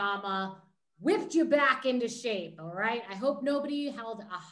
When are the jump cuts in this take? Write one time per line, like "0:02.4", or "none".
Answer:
none